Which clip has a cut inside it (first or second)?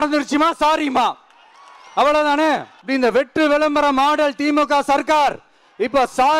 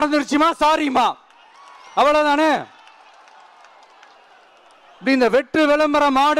first